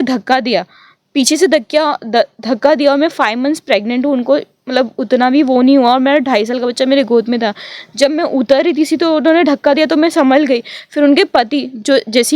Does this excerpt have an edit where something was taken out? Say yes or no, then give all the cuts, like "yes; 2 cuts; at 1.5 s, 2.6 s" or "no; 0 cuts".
no; 0 cuts